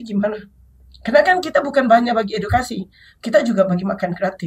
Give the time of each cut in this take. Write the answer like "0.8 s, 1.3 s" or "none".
none